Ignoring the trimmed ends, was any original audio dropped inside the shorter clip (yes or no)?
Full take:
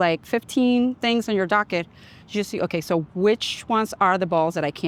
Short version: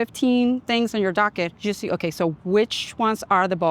yes